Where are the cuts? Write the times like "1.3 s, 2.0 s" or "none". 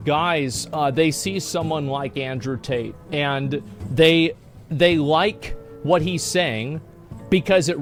none